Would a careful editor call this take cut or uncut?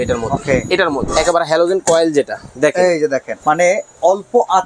cut